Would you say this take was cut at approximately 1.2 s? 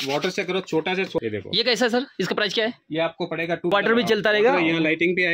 yes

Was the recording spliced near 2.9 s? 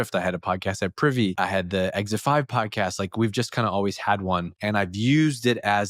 no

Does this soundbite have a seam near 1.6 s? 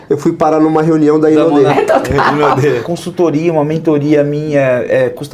yes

